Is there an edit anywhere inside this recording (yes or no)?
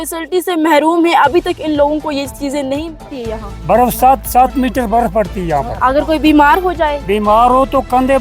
yes